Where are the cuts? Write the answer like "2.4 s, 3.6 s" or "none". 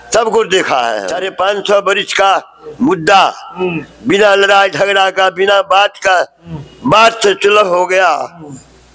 1.2 s